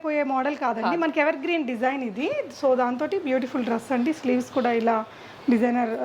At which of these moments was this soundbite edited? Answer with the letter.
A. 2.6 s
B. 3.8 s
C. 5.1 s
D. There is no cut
D